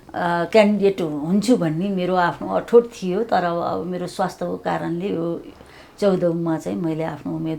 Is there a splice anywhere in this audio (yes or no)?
no